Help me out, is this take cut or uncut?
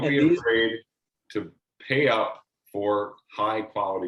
uncut